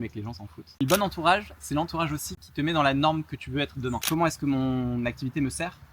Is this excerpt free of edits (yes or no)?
no